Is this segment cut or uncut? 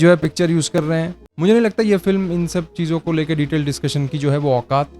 cut